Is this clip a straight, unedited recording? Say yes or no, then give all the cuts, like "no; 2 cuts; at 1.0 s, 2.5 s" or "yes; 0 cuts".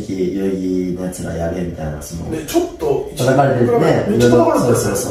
yes; 0 cuts